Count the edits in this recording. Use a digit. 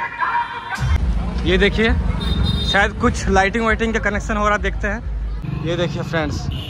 2